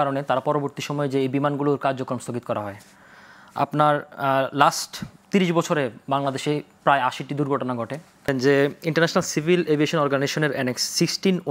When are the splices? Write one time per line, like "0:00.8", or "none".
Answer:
0:08.3